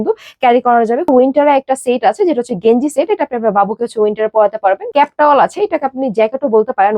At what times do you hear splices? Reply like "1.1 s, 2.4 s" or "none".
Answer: 1.1 s, 4.8 s